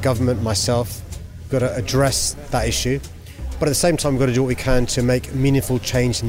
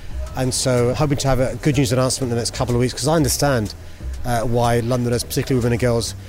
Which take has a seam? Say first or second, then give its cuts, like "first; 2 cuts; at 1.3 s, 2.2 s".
second; 1 cut; at 0.9 s